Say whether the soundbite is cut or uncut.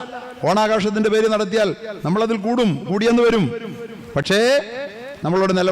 uncut